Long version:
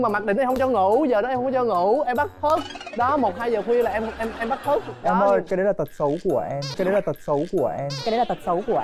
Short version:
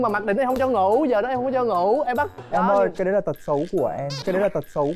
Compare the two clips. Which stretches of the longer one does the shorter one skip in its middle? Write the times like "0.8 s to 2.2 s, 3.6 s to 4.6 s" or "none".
2.4 s to 4.9 s